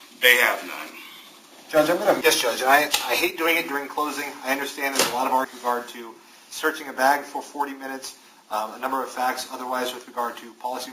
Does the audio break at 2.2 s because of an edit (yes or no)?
yes